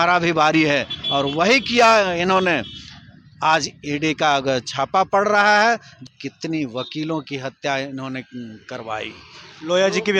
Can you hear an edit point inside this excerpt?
yes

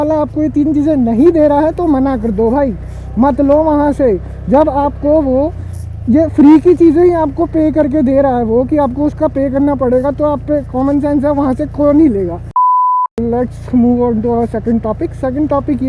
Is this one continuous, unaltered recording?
yes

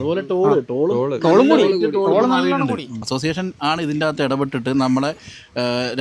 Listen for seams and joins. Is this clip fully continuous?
no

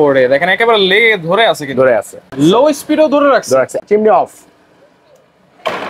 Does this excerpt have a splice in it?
yes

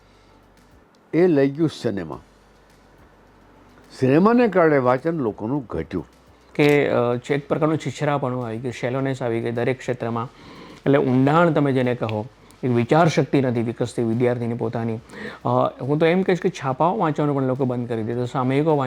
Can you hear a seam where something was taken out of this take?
yes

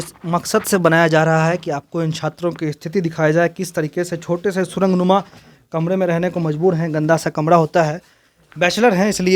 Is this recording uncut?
yes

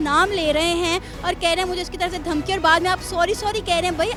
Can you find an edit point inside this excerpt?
no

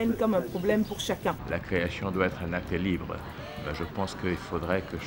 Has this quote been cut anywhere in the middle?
yes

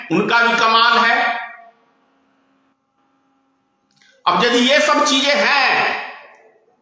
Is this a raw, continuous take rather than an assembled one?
yes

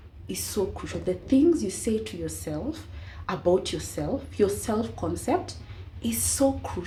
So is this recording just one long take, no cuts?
yes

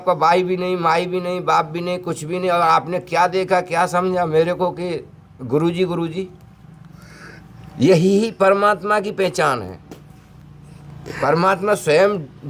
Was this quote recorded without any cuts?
yes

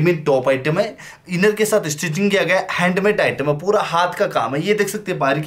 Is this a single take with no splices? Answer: yes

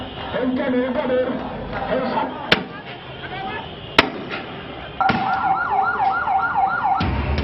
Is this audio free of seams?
yes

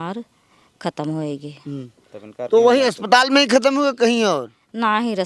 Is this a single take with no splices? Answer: yes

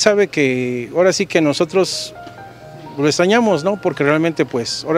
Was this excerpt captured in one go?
yes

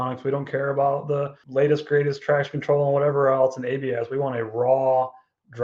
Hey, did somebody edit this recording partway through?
yes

